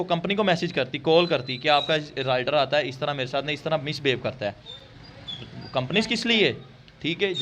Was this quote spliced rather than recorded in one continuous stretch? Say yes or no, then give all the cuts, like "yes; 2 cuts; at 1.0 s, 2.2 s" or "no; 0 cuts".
no; 0 cuts